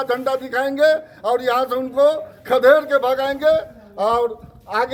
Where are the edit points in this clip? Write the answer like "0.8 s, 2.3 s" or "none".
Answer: none